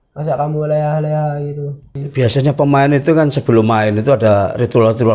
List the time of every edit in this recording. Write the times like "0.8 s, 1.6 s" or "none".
2.0 s

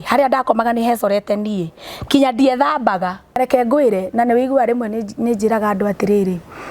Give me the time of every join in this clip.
3.4 s

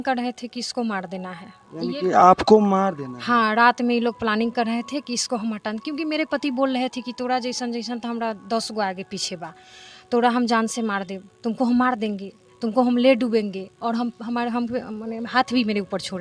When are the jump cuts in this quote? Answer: none

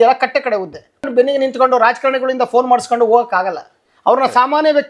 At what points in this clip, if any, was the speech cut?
1.1 s

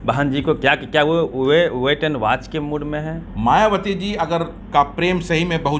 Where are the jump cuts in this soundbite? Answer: 3.2 s, 4.6 s

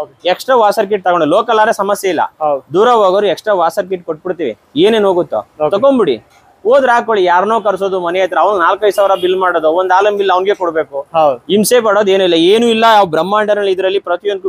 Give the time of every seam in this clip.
none

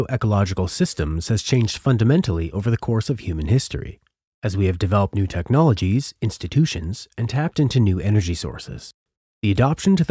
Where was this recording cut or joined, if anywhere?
6.4 s

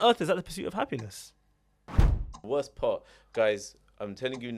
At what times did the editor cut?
2.1 s

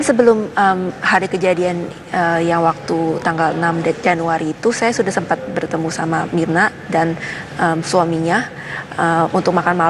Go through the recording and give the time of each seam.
6.9 s

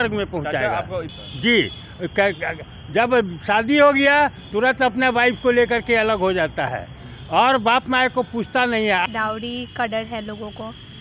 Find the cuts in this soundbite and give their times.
9.1 s

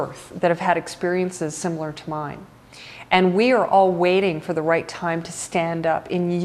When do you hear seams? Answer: none

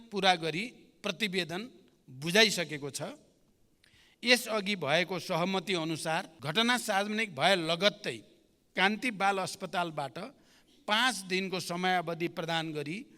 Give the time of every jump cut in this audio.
6.4 s

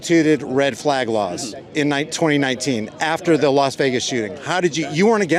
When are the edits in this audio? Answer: none

